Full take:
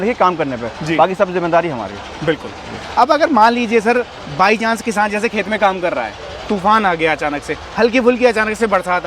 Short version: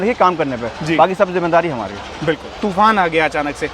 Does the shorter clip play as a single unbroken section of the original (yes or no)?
no